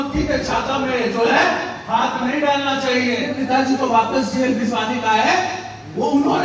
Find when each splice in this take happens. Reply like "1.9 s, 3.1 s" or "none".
3.3 s